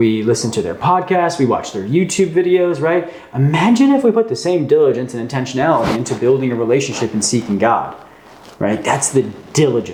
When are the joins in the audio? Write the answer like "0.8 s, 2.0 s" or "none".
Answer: none